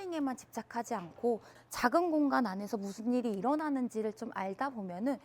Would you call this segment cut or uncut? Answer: cut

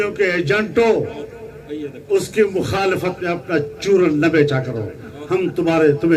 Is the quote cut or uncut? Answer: uncut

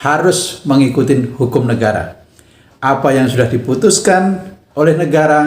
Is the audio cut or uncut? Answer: uncut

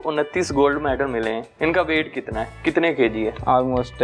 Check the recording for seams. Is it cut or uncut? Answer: uncut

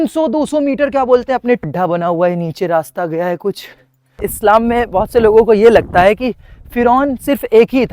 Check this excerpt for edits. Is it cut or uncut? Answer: cut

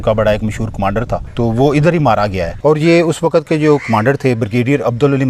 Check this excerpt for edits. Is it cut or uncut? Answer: cut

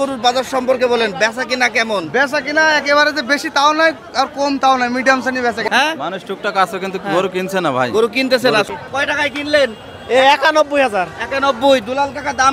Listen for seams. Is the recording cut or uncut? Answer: cut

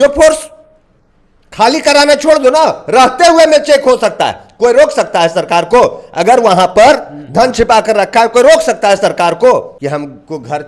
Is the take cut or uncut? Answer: cut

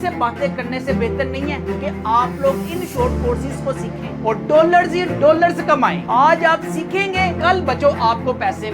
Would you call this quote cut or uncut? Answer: uncut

